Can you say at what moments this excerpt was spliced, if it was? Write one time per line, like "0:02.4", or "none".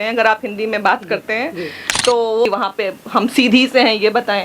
0:02.5